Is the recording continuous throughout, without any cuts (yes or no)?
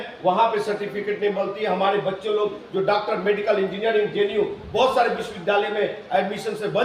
yes